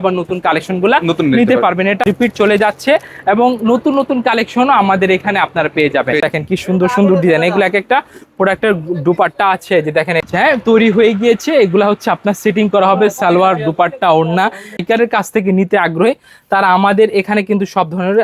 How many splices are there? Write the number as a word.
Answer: four